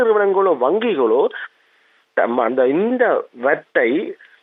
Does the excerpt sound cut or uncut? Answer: uncut